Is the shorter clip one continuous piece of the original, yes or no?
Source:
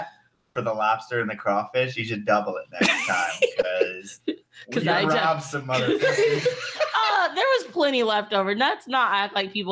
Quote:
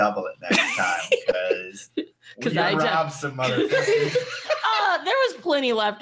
yes